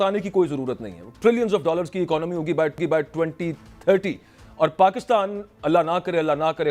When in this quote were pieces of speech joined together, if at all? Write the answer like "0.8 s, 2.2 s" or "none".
none